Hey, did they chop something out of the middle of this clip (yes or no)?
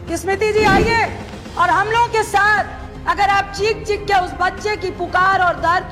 no